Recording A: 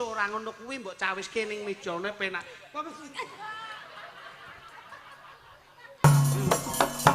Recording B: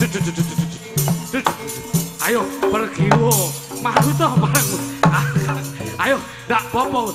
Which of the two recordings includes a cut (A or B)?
A